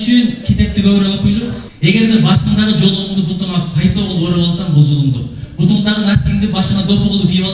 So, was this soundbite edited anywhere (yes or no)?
yes